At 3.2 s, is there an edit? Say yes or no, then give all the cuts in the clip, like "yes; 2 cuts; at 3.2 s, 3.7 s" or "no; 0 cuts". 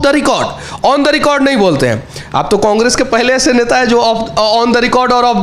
no; 0 cuts